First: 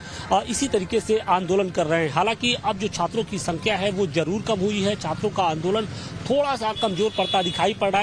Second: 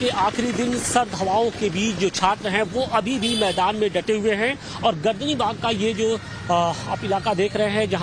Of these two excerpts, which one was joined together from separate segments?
second; 1 cut; at 5.0 s

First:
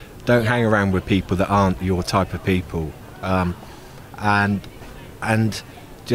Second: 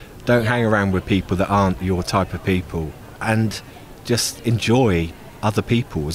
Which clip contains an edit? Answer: second; 2 cuts; at 3.0 s, 5.2 s

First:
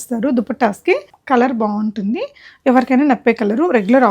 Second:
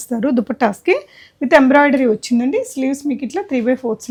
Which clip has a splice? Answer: first; 1 cut; at 1.1 s

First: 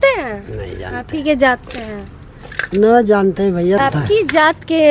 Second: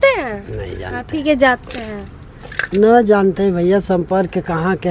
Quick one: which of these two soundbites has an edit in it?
first; 1 cut; at 3.8 s

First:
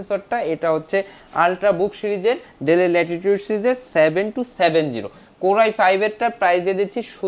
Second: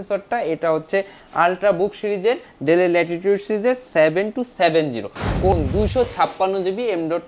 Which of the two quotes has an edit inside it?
second; 1 cut; at 5.5 s

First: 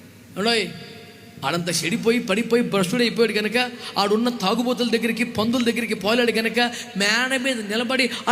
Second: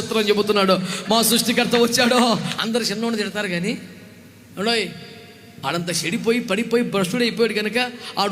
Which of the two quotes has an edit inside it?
second; 1 cut; at 2.5 s

